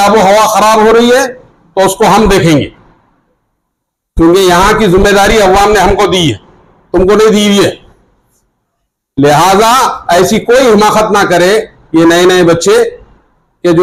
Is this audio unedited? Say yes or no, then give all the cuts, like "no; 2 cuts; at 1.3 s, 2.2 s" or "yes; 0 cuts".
yes; 0 cuts